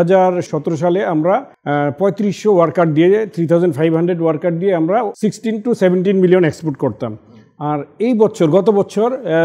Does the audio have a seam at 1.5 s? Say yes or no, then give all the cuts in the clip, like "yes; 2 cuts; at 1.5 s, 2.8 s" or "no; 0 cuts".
yes; 2 cuts; at 1.5 s, 5.1 s